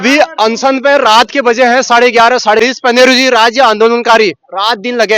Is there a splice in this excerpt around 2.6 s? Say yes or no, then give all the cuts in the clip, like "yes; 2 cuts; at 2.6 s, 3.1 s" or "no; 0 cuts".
yes; 1 cut; at 2.6 s